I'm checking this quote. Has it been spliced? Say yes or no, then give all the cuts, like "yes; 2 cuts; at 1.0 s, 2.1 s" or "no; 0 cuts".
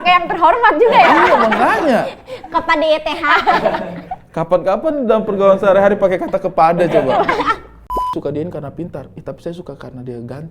yes; 1 cut; at 8.1 s